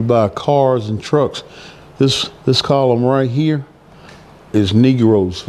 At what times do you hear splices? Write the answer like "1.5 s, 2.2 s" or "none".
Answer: none